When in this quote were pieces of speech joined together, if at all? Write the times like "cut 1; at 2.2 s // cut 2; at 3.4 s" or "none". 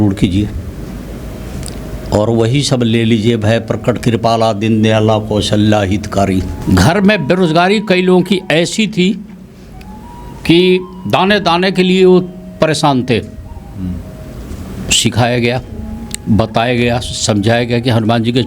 cut 1; at 6.5 s